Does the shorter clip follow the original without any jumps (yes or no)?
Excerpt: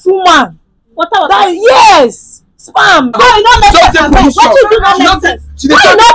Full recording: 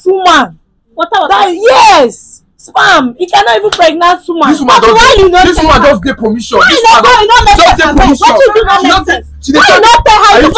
no